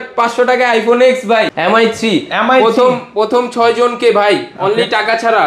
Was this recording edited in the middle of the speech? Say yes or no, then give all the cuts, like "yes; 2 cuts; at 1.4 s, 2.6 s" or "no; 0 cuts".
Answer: yes; 1 cut; at 1.5 s